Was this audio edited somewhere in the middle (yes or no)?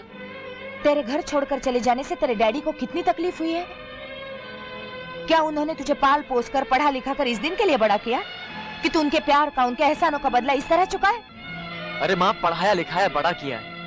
no